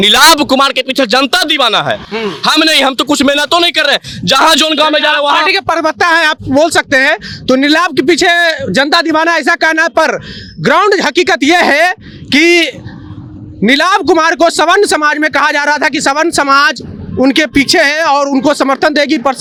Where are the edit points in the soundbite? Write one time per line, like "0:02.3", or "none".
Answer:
none